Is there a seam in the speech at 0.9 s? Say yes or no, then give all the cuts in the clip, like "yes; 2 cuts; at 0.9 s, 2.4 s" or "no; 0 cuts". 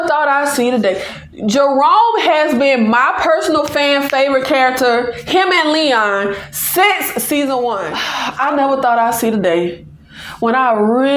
no; 1 cut; at 8.0 s